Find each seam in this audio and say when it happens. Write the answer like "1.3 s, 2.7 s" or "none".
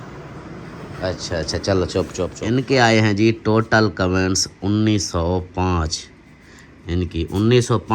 2.3 s